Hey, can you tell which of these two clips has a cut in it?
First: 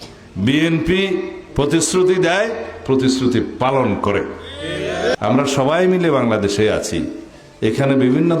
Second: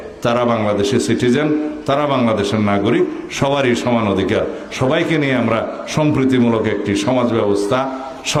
first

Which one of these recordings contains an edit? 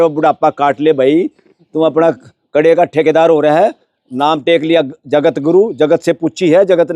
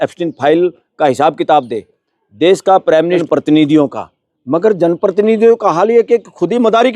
second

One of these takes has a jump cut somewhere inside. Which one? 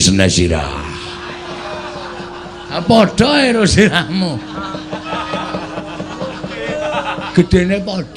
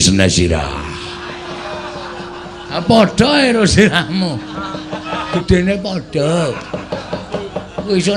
second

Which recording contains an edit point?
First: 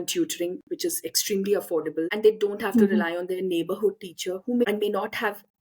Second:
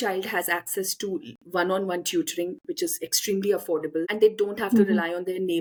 first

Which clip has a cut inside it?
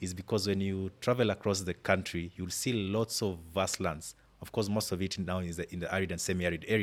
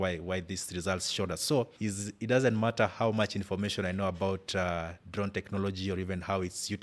second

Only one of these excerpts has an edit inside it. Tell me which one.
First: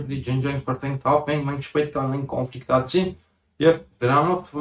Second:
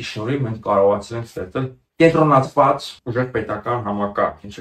second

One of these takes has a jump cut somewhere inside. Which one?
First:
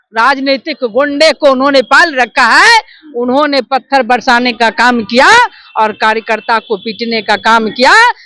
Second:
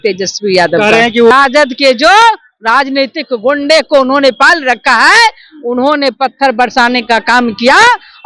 second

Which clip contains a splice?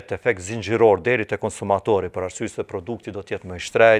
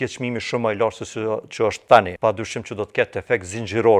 second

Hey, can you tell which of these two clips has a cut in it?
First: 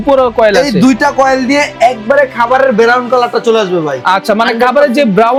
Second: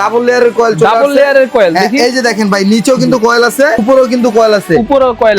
second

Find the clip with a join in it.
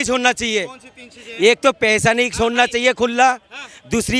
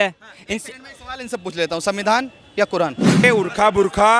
second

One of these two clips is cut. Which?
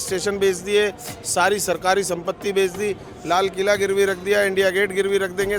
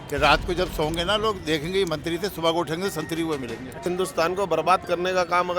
second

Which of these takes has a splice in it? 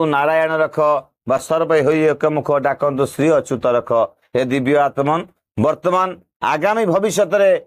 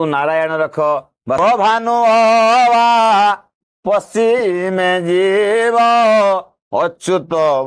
second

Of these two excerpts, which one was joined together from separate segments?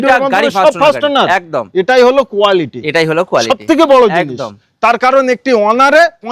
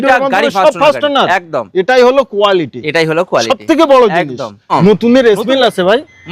second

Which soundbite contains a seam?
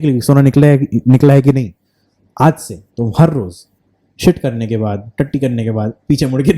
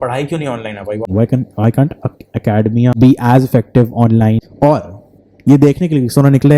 second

